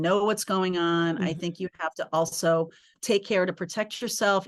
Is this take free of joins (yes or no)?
no